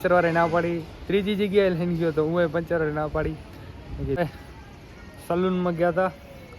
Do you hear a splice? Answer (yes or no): yes